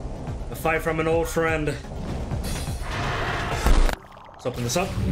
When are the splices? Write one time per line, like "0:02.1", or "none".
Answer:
0:03.7